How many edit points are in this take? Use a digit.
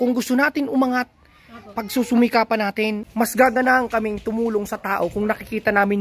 1